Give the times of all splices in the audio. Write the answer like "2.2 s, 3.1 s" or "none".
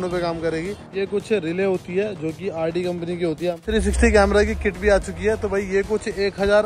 0.9 s, 3.6 s